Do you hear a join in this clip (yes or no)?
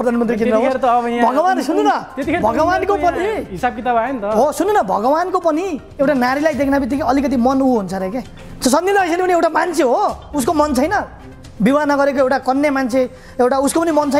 no